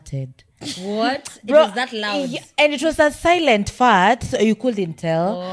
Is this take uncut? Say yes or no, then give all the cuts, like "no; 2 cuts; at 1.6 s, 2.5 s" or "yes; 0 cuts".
yes; 0 cuts